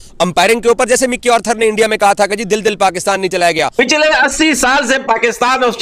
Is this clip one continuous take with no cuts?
no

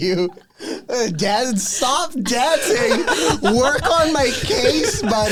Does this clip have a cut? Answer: no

